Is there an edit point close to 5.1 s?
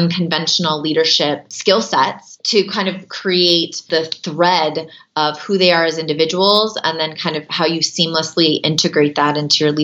no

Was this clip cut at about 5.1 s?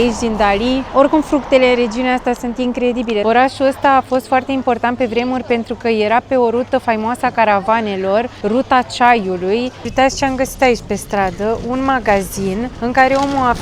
no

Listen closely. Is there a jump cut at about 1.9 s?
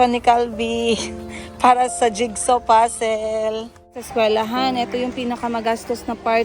no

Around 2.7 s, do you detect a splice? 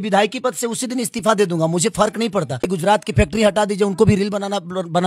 yes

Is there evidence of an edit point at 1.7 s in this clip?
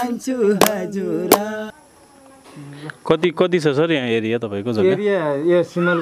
yes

